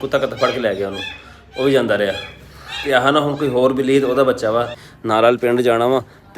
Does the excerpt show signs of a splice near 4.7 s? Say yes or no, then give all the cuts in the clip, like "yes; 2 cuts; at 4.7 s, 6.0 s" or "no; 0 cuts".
yes; 1 cut; at 4.7 s